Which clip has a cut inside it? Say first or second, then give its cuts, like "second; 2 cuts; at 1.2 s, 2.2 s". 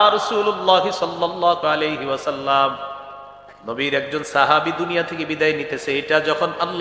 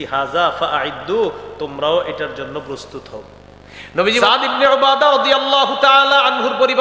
second; 1 cut; at 4.2 s